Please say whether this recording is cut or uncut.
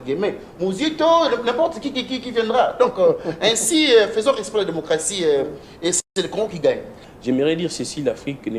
cut